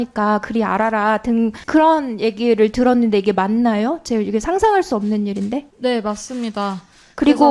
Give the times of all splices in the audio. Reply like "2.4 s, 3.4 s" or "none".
none